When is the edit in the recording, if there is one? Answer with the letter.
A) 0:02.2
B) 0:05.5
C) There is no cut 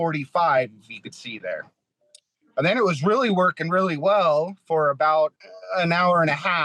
B